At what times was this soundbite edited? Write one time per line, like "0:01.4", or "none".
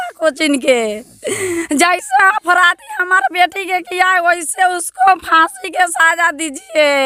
none